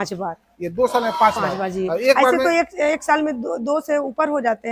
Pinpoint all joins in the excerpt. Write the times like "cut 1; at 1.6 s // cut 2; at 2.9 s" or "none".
none